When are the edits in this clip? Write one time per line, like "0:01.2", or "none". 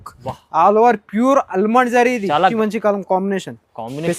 0:02.5